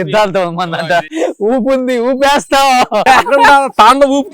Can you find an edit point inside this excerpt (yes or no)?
yes